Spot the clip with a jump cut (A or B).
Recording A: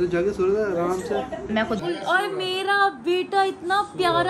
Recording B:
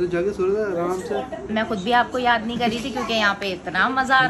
A